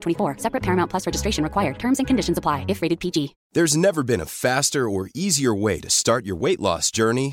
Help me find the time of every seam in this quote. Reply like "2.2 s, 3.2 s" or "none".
3.4 s